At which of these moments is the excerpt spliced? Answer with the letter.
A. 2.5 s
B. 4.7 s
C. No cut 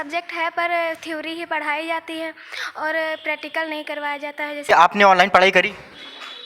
B